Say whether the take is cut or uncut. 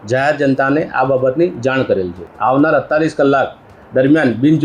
cut